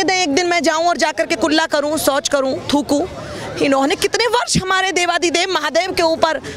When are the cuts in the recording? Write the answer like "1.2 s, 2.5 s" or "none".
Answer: none